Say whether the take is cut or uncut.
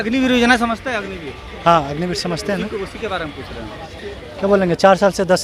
uncut